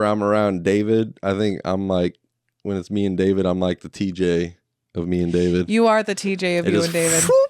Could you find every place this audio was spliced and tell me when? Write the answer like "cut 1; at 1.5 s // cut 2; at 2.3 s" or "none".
none